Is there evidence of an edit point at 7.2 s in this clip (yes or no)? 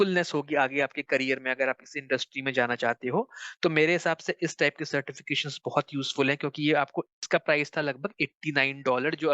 yes